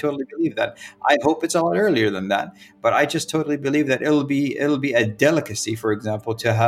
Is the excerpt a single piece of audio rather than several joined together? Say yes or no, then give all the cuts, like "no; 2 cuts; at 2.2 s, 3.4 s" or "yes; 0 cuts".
yes; 0 cuts